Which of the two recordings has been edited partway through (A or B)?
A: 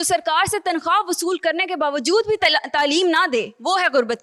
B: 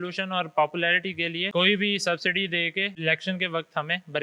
B